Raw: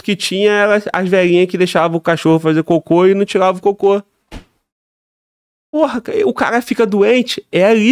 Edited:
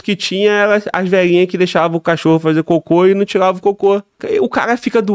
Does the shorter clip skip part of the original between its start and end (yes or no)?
yes